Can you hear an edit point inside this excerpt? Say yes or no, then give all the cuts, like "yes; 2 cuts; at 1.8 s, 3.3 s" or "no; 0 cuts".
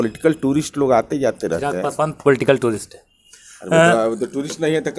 no; 0 cuts